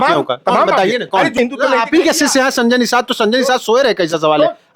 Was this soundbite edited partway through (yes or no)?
yes